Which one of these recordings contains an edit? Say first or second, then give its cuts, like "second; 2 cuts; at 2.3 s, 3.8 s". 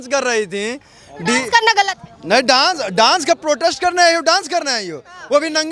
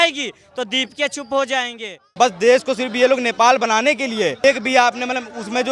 second; 2 cuts; at 2.0 s, 4.4 s